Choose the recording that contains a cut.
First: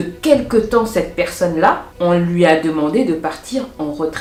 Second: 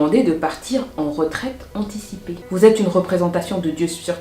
second; 1 cut; at 2.4 s

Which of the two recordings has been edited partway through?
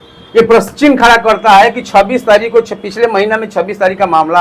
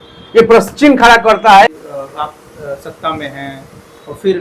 second; 1 cut; at 1.8 s

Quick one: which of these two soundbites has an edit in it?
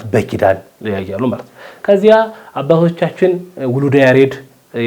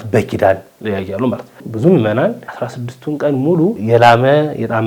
second; 1 cut; at 1.7 s

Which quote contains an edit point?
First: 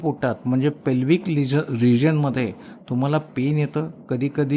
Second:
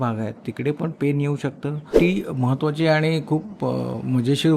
second; 1 cut; at 1.9 s

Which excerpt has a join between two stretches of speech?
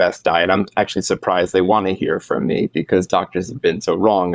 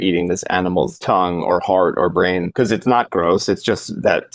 second; 2 cuts; at 1.0 s, 2.5 s

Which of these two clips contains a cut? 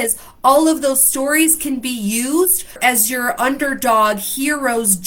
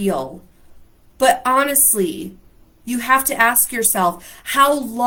first; 1 cut; at 2.8 s

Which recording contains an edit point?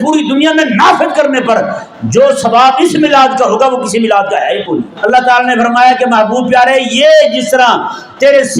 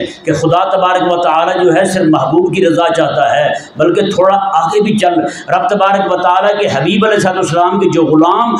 first; 1 cut; at 4.9 s

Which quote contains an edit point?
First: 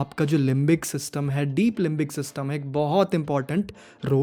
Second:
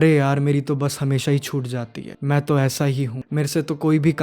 second; 2 cuts; at 2.0 s, 3.2 s

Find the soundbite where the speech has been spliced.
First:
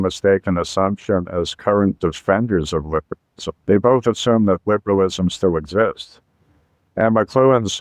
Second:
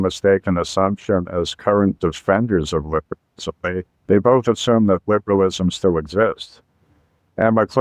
first; 1 cut; at 3.5 s

